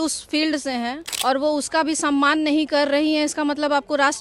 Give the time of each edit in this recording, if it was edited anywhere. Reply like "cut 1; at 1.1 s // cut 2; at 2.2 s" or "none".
cut 1; at 1.1 s